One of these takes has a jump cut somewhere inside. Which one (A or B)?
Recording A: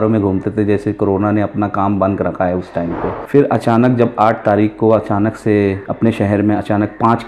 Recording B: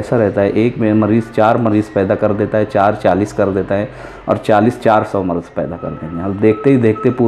A